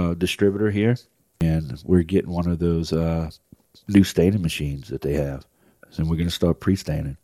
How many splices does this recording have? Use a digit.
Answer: 1